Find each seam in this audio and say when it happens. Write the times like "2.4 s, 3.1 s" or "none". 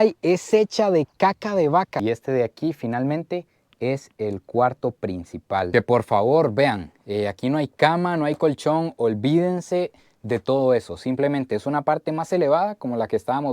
2.0 s